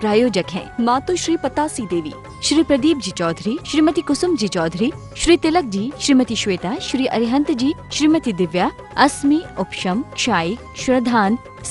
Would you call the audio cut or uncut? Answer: uncut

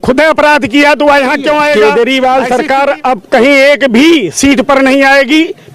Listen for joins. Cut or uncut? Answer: cut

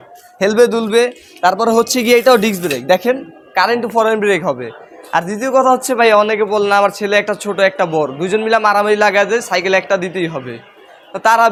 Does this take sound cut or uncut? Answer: uncut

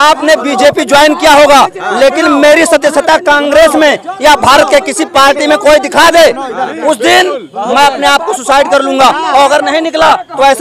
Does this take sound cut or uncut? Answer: uncut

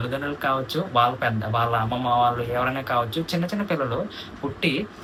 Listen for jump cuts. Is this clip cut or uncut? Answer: uncut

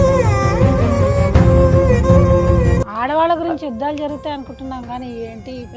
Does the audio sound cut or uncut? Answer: cut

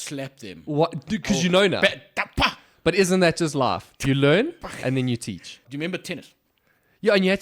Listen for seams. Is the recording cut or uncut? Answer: cut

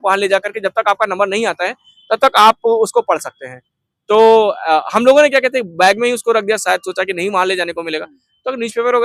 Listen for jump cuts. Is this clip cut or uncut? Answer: uncut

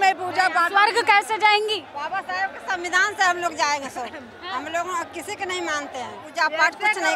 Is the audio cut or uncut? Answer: cut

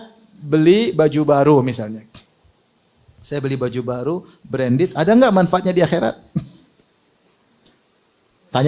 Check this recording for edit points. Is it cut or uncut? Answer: uncut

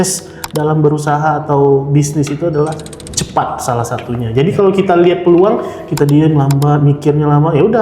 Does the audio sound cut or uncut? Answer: uncut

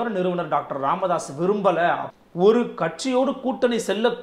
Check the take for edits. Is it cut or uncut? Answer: cut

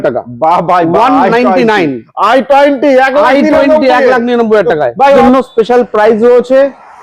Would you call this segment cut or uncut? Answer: cut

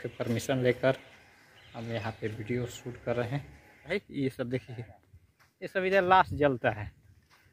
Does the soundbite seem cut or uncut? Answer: cut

